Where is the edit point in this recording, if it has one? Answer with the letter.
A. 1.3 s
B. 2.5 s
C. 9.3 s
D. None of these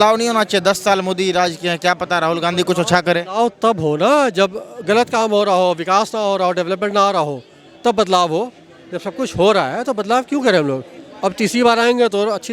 D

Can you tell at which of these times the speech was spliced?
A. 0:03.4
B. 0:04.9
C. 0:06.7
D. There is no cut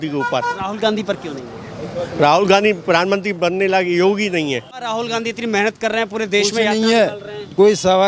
B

